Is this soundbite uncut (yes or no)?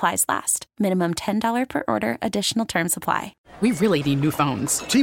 no